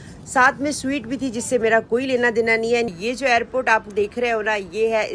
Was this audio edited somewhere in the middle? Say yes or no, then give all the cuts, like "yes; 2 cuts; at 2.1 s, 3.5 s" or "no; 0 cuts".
yes; 1 cut; at 2.9 s